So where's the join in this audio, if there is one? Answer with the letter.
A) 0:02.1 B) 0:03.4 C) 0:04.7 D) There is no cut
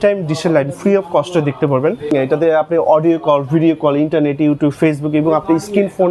A